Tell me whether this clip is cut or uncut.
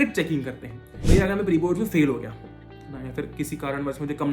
cut